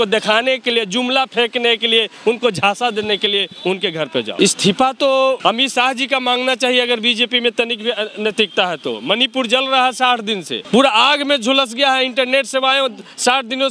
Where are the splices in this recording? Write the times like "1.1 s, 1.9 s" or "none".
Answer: 4.3 s, 5.4 s, 10.6 s